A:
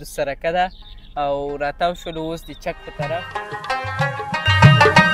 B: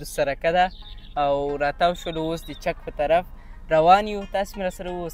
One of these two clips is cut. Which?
A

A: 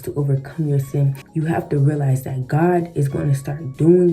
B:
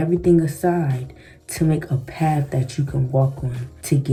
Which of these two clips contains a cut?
A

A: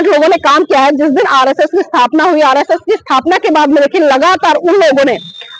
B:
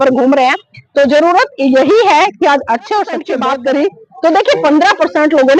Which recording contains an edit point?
B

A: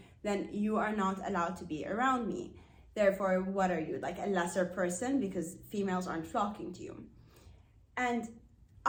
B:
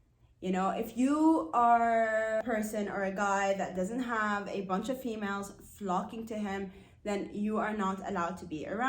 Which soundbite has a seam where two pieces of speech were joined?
B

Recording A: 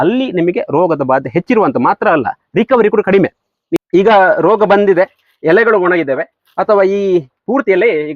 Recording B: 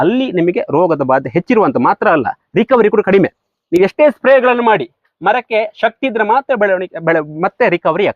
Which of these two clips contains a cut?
A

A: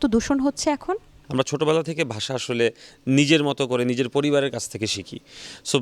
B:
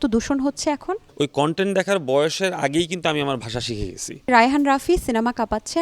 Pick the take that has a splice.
B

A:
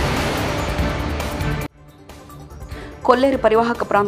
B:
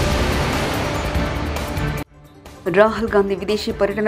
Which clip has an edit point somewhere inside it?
A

